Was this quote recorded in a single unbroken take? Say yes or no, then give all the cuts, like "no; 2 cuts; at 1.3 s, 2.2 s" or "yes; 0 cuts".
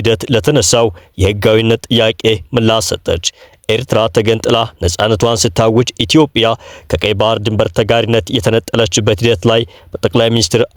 yes; 0 cuts